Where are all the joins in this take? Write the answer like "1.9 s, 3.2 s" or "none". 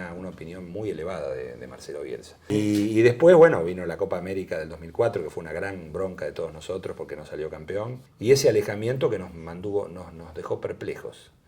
2.4 s, 8.0 s